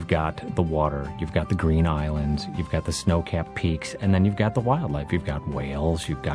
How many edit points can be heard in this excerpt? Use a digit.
0